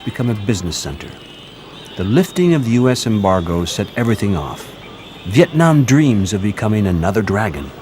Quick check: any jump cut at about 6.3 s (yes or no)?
yes